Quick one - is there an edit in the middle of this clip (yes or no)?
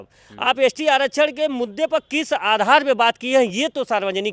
no